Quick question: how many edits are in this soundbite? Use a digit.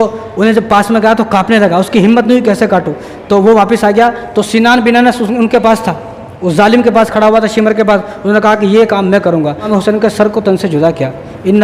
1